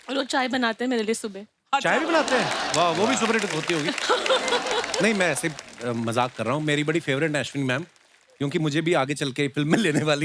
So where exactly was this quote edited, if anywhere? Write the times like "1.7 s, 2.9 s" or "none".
none